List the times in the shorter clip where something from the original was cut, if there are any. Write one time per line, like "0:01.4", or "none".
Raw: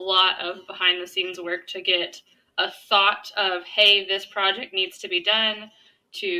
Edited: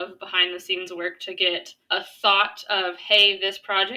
0:01.7